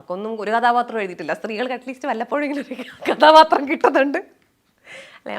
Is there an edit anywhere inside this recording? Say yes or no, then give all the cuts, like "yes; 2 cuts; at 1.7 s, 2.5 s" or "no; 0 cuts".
no; 0 cuts